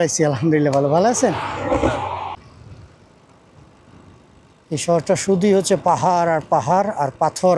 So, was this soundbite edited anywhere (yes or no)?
yes